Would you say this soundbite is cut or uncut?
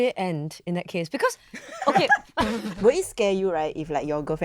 cut